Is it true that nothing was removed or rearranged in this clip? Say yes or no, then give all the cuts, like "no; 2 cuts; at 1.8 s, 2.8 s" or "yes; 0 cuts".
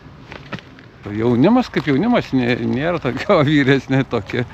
no; 1 cut; at 1.0 s